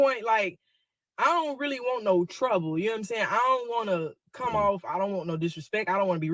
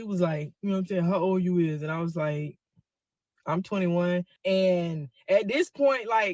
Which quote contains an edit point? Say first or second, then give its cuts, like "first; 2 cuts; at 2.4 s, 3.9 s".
second; 1 cut; at 4.3 s